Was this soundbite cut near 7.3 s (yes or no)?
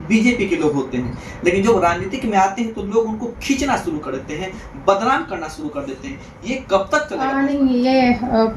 yes